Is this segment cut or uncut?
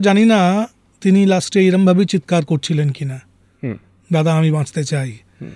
uncut